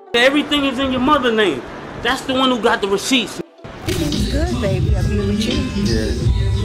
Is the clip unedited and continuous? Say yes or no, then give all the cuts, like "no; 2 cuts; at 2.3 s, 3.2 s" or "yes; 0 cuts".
no; 1 cut; at 3.8 s